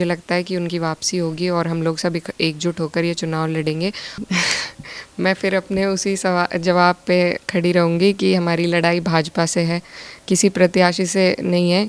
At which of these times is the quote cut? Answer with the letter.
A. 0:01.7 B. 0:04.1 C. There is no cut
B